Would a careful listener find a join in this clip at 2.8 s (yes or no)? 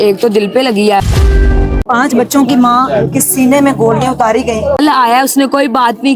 no